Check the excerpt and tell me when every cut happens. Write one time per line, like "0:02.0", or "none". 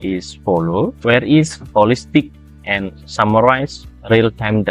0:01.0